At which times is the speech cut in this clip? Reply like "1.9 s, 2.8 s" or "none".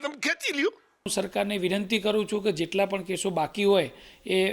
1.1 s